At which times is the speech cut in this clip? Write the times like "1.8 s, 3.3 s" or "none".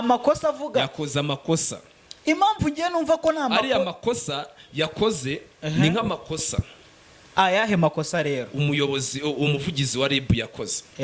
none